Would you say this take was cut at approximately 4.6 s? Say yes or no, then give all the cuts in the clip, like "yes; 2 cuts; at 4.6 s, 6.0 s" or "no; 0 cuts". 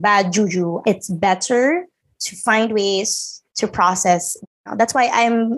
yes; 2 cuts; at 0.8 s, 4.6 s